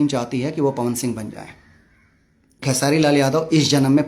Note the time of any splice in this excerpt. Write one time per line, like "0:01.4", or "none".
0:02.8

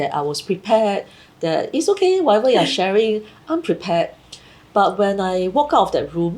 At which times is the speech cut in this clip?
none

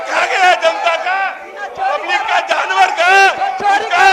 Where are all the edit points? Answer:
none

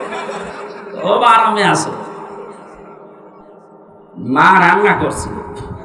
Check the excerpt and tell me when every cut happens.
0:04.1

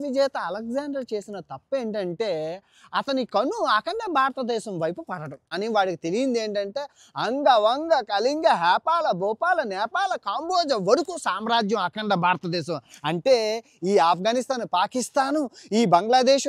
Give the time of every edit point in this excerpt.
0:05.4

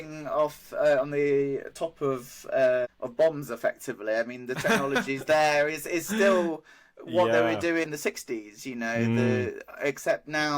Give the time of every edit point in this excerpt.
0:03.0
0:07.8

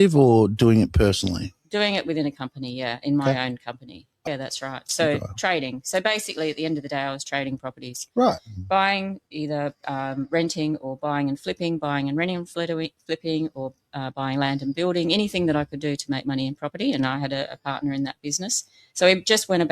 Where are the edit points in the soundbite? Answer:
0:04.2

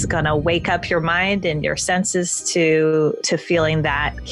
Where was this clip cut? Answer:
none

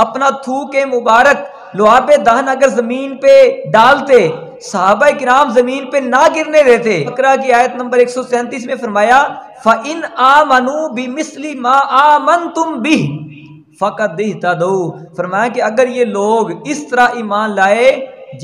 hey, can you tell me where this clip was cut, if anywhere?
0:07.1

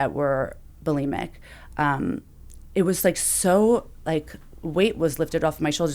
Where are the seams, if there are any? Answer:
none

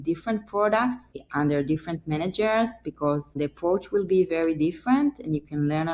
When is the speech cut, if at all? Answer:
0:01.2
0:03.4

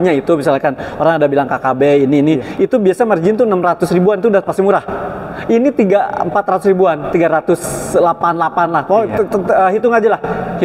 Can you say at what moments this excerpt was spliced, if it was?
none

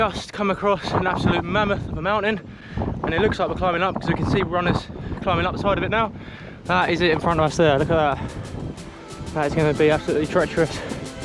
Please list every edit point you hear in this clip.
none

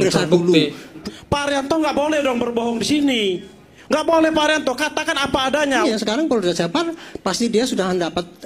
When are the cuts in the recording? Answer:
0:01.0
0:05.8

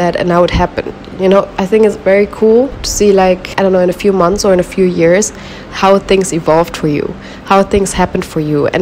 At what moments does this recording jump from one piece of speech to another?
none

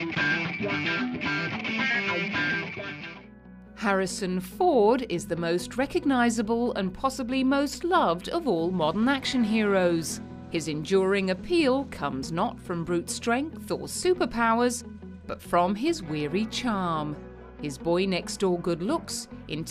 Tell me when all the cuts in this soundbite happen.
none

